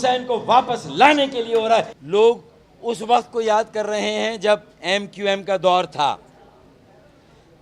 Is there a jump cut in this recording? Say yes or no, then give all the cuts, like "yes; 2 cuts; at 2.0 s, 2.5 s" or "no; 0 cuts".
no; 0 cuts